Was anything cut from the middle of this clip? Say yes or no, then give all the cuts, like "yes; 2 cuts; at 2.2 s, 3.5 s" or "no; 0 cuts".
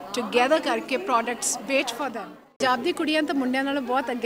yes; 1 cut; at 2.6 s